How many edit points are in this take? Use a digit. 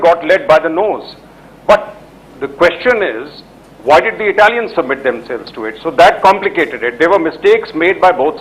1